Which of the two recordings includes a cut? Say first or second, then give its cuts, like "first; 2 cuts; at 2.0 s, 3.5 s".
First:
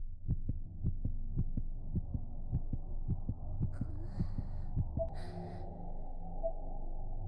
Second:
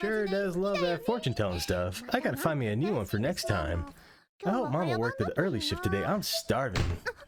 first; 1 cut; at 5.1 s